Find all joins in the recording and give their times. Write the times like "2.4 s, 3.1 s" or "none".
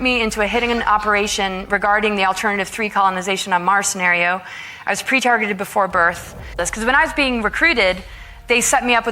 6.7 s